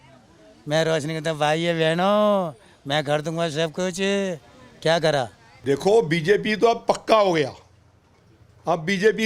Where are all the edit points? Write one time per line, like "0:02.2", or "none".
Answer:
0:05.4